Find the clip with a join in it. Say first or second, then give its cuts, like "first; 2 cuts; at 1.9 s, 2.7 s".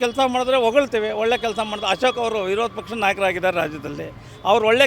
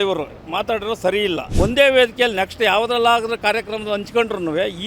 second; 1 cut; at 1.5 s